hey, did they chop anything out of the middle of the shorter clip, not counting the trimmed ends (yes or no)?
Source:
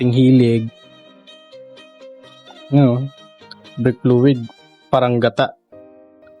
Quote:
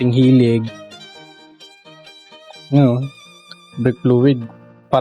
no